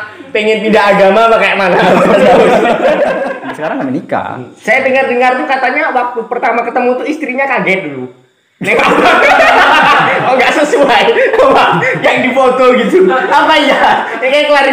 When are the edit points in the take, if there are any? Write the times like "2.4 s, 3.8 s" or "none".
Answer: 3.4 s